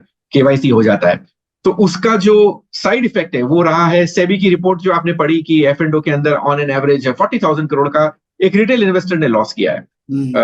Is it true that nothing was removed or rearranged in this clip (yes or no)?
yes